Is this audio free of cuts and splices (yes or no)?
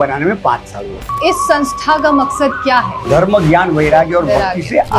no